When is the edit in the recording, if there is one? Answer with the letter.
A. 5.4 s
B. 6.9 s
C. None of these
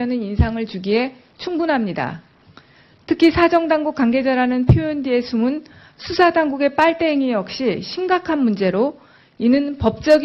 B